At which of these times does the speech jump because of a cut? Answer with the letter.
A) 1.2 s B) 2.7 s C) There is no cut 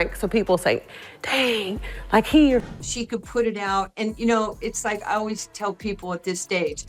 B